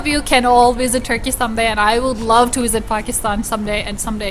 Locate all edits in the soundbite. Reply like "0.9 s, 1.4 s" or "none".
none